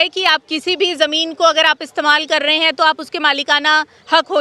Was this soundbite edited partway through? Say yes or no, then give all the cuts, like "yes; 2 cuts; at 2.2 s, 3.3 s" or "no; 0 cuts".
no; 0 cuts